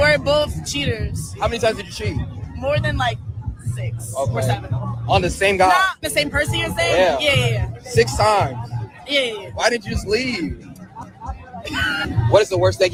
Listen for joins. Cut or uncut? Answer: uncut